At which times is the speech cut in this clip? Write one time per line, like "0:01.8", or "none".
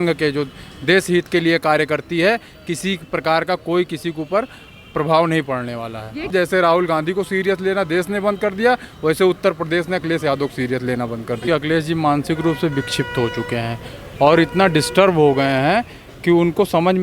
0:06.3
0:11.4

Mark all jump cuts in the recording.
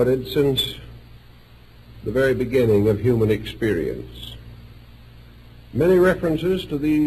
0:02.4

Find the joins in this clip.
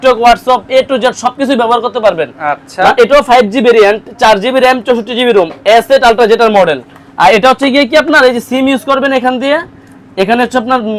none

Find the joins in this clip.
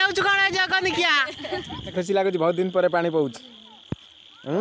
0:01.9

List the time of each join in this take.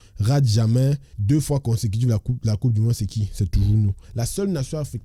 0:01.1

